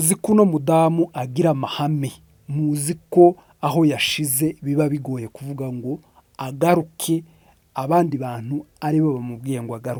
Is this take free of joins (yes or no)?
yes